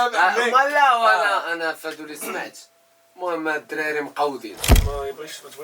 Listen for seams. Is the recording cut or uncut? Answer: cut